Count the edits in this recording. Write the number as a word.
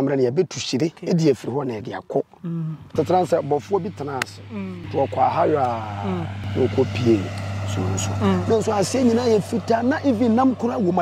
four